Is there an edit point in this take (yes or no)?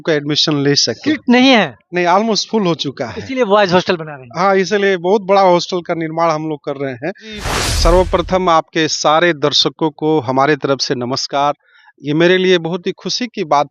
yes